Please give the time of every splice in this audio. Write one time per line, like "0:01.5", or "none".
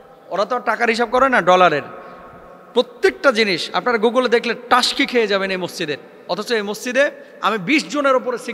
none